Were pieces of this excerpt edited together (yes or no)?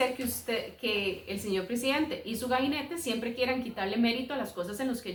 no